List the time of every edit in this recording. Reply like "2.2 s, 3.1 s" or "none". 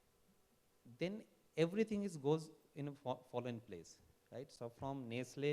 4.5 s

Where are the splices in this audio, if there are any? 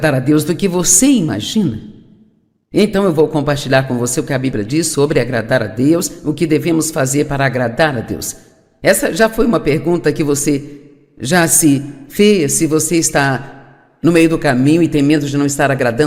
1.4 s

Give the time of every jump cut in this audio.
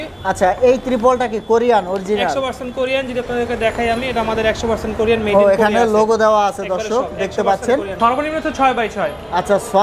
7.9 s

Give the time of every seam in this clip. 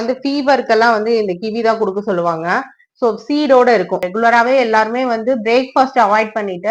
4.1 s

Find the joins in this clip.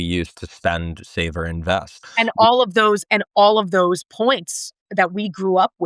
2.0 s

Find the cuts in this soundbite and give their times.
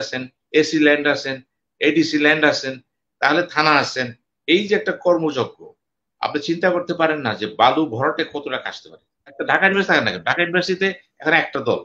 9.4 s

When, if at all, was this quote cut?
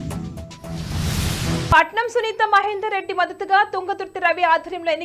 1.6 s

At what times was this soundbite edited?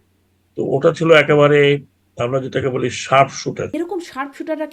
3.7 s

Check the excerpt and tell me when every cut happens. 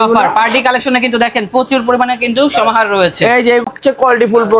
3.7 s

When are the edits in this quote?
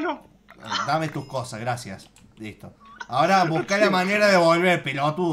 none

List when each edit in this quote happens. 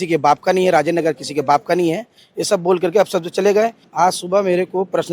3.9 s

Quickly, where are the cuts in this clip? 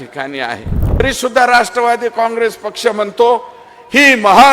1.0 s

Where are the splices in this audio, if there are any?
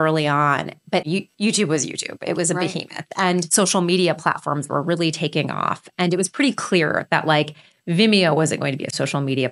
1.0 s

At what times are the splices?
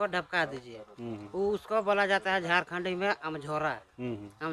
none

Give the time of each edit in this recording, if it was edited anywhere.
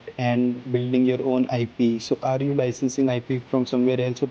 none

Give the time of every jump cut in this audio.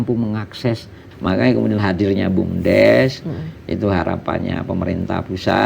1.0 s

